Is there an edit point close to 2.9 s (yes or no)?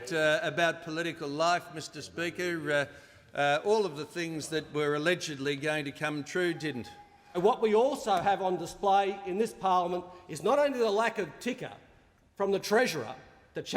no